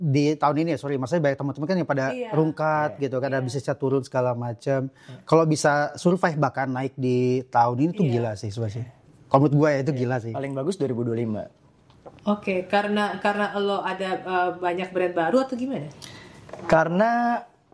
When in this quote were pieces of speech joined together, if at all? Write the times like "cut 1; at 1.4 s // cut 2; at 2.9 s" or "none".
none

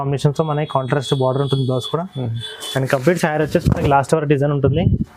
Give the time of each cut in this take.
none

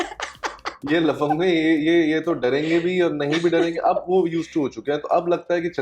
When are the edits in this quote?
none

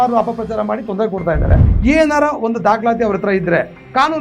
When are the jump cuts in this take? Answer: cut 1; at 1.7 s

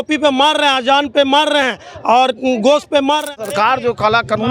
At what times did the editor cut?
cut 1; at 3.5 s

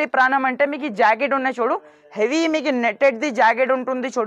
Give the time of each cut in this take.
none

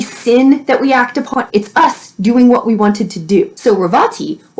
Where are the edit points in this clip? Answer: cut 1; at 1.3 s // cut 2; at 3.5 s

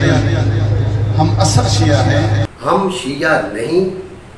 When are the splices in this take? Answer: cut 1; at 2.5 s

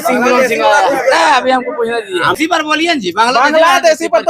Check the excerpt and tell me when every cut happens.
cut 1; at 2.4 s

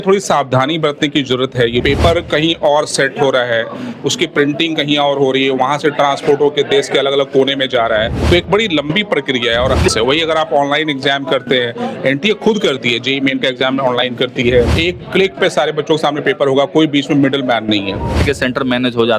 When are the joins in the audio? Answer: cut 1; at 1.8 s // cut 2; at 8.2 s // cut 3; at 9.9 s // cut 4; at 14.7 s // cut 5; at 18.2 s

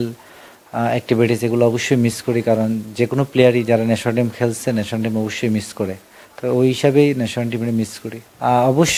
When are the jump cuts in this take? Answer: none

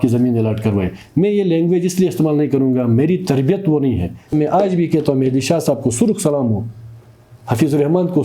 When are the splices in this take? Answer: cut 1; at 4.3 s

